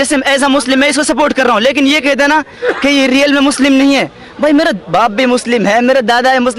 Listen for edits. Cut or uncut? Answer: uncut